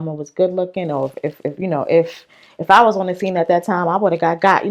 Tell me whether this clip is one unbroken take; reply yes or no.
yes